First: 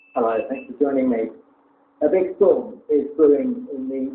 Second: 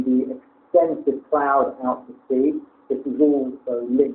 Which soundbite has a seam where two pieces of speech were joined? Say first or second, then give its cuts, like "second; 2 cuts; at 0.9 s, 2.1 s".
second; 1 cut; at 1.0 s